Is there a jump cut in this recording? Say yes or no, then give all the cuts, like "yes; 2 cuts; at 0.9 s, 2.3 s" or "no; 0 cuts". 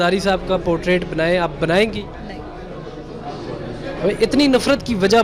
no; 0 cuts